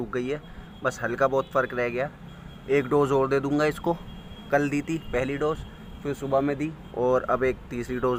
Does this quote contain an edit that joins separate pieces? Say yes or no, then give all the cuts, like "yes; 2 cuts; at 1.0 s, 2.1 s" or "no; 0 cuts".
no; 0 cuts